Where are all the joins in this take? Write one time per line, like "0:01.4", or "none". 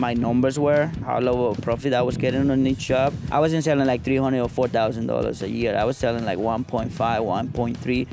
0:03.2